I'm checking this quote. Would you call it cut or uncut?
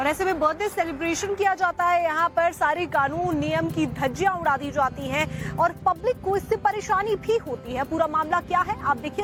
uncut